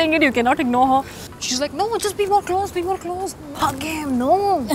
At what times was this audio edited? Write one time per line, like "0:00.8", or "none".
0:01.2
0:03.5